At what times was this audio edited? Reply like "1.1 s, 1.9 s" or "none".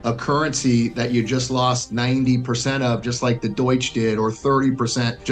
none